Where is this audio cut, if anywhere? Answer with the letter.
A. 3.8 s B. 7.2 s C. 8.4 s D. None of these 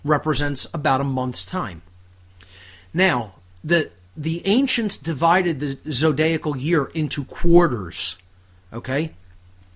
D